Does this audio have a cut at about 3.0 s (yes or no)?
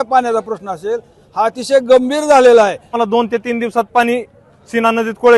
yes